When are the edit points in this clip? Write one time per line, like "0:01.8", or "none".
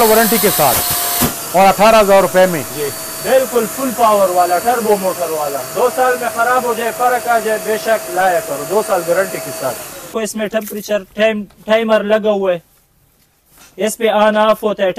0:10.1